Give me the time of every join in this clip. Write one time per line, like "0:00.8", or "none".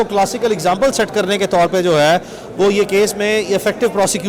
none